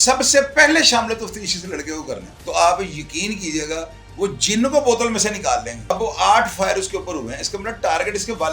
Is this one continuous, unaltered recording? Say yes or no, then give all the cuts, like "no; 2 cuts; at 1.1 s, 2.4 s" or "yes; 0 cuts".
no; 2 cuts; at 2.3 s, 5.9 s